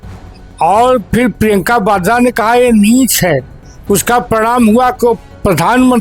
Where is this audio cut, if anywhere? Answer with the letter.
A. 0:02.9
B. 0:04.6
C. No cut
C